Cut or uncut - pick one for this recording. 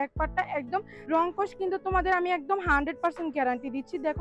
cut